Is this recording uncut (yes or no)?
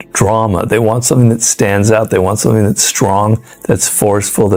yes